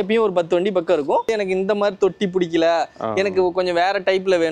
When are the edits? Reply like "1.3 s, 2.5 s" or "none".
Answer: 1.3 s

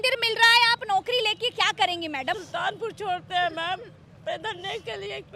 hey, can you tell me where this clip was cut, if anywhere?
2.4 s

